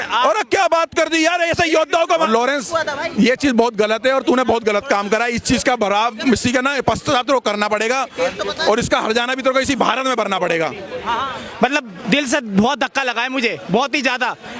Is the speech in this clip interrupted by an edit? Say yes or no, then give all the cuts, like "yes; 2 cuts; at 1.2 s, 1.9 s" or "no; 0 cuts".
yes; 2 cuts; at 2.3 s, 11.4 s